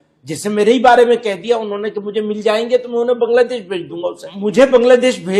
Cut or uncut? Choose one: cut